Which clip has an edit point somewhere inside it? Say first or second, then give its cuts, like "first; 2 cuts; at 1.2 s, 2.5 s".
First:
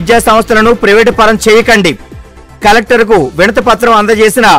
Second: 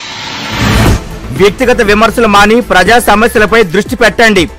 second; 1 cut; at 0.9 s